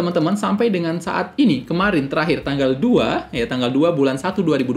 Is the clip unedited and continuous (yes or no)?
yes